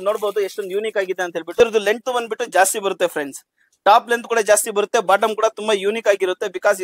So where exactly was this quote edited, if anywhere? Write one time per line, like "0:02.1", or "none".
none